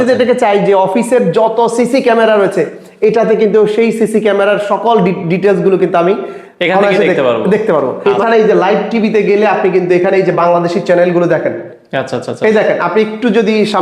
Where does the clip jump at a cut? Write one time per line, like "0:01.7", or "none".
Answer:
0:07.9